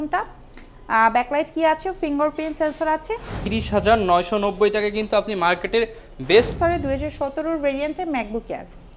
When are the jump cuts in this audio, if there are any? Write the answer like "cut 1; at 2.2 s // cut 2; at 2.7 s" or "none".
cut 1; at 3.4 s // cut 2; at 6.5 s

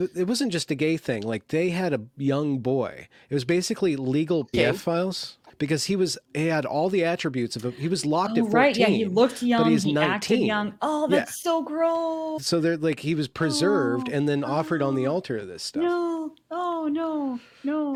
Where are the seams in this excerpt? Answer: none

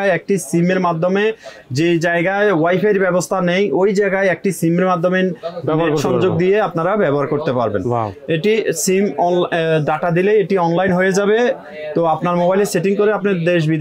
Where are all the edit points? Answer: none

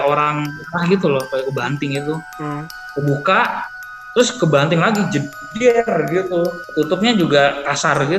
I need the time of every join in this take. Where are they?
cut 1; at 6.6 s

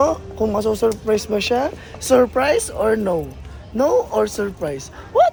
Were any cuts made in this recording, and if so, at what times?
none

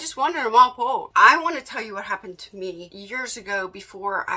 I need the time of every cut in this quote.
cut 1; at 1.1 s // cut 2; at 2.9 s

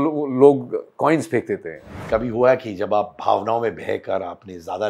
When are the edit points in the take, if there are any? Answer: cut 1; at 1.9 s

